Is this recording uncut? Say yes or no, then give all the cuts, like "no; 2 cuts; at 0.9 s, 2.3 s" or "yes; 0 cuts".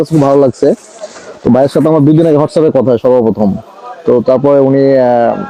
yes; 0 cuts